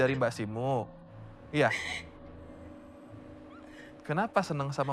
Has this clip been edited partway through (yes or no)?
no